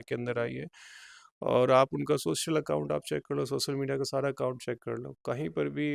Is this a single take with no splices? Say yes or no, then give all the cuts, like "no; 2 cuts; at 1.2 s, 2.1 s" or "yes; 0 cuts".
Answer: yes; 0 cuts